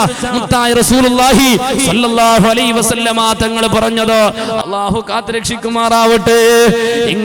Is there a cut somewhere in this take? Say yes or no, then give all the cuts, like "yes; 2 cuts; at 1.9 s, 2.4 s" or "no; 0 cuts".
yes; 1 cut; at 4.6 s